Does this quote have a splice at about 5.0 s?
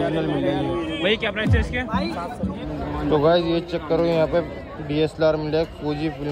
no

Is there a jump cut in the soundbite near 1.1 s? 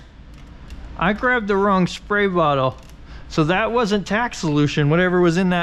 no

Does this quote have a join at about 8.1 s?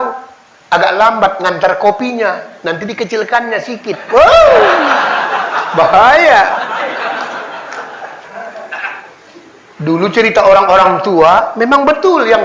yes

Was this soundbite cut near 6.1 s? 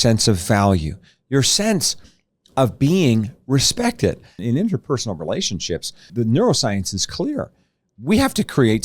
yes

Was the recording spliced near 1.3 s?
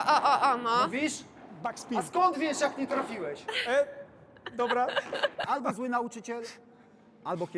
no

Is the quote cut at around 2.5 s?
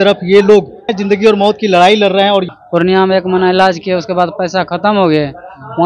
yes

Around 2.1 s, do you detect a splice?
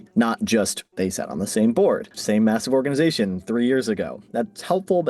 yes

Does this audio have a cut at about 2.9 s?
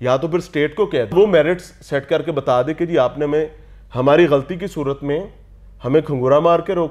no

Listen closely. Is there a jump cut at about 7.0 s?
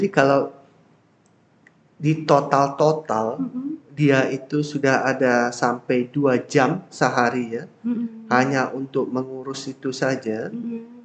no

